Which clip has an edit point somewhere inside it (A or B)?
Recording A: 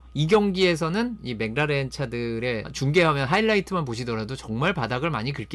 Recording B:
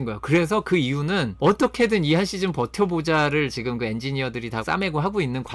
B